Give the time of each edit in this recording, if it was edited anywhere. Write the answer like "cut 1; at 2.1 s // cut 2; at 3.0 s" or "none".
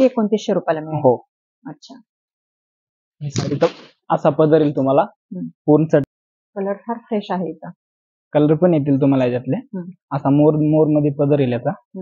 cut 1; at 6.0 s